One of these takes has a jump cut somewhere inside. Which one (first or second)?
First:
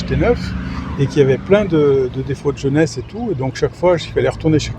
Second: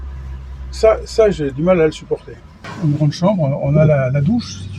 second